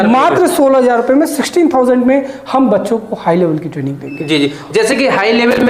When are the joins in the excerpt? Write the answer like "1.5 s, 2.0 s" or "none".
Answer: none